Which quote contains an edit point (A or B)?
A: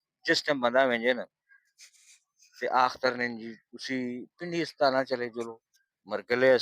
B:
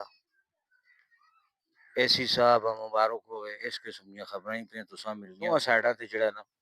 B